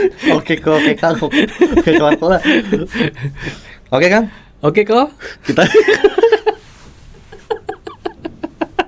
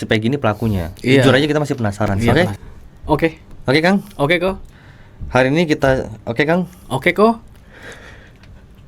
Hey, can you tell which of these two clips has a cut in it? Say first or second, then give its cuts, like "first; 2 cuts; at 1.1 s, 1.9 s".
second; 1 cut; at 2.3 s